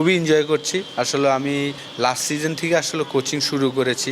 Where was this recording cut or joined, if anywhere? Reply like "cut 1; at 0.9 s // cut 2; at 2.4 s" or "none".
cut 1; at 1.8 s